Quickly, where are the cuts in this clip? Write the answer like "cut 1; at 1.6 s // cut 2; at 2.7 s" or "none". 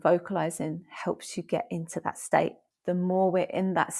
cut 1; at 2.7 s